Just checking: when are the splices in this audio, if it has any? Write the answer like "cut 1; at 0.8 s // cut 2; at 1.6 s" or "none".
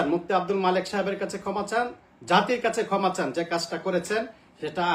none